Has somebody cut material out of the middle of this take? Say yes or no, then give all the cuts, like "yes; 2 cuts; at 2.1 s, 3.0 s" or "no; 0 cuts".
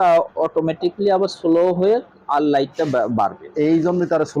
no; 0 cuts